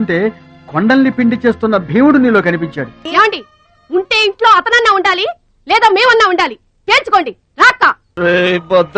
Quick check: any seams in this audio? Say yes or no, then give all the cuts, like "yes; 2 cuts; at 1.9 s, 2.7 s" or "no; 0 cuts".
yes; 2 cuts; at 3.1 s, 8.1 s